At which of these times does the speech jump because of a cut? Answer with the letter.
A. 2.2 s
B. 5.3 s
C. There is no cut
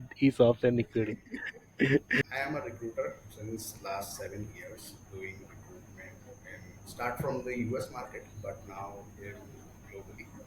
A